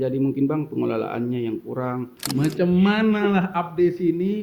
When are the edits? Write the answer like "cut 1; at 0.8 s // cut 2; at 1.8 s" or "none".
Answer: cut 1; at 2.3 s